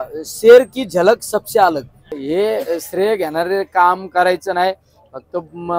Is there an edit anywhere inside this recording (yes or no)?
yes